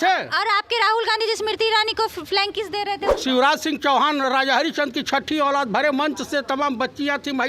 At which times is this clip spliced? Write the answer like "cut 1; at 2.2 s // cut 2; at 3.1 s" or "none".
cut 1; at 3.1 s